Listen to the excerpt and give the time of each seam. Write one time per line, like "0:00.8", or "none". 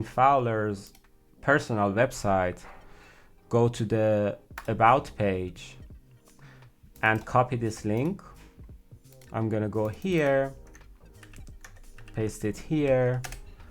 0:05.6
0:07.0